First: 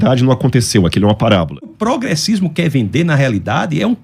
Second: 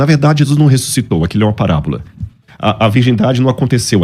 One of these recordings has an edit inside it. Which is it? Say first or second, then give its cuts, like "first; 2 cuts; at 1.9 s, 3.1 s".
first; 1 cut; at 1.8 s